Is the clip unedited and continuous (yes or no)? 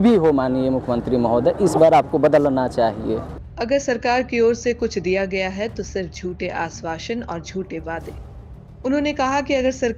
yes